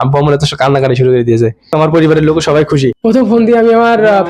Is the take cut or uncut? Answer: cut